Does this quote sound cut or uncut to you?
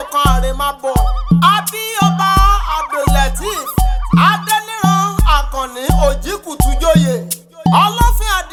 uncut